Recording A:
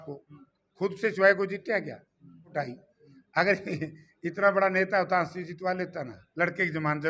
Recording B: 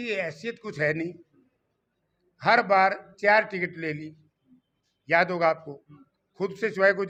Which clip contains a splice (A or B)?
A